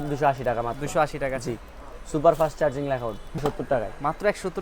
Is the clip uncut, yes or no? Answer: no